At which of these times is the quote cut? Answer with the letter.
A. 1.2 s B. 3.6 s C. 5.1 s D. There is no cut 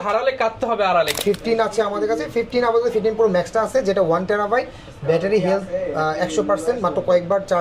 A